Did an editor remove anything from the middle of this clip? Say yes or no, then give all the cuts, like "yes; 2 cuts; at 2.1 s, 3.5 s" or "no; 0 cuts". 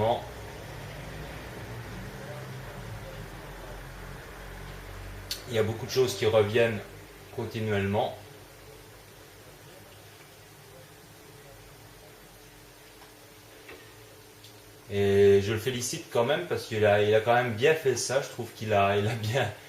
yes; 1 cut; at 9.6 s